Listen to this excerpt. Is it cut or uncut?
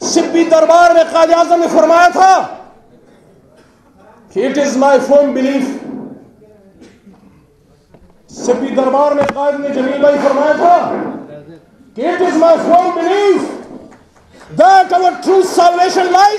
uncut